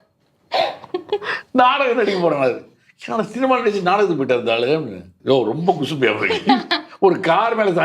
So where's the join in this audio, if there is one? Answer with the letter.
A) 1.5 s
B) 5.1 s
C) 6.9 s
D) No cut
B